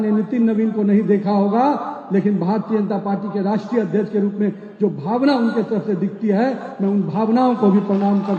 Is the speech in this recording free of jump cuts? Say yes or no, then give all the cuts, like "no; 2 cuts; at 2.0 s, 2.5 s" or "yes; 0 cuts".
yes; 0 cuts